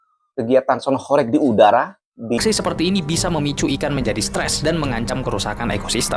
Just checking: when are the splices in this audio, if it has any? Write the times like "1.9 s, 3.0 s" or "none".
2.4 s